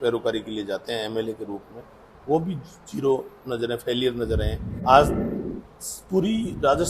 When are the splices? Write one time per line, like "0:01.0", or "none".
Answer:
0:04.6